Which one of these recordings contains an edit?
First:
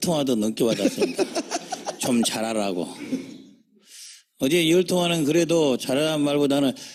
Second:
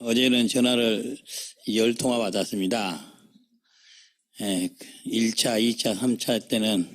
second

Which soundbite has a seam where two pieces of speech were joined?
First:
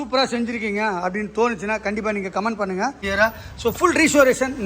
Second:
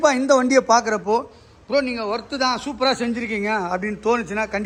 first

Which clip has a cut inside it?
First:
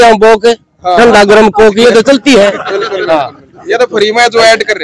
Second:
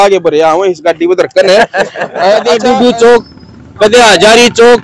second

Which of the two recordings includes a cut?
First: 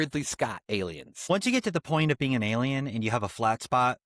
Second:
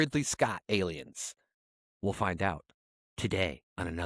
first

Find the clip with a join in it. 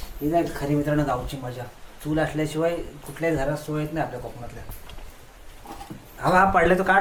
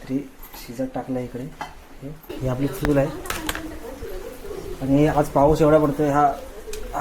second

